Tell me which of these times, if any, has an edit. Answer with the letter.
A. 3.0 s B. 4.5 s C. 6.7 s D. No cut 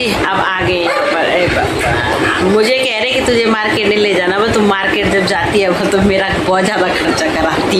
D